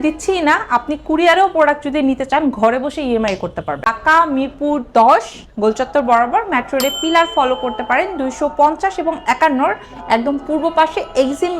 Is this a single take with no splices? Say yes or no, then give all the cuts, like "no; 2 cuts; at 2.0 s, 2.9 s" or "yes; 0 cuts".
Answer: no; 1 cut; at 3.9 s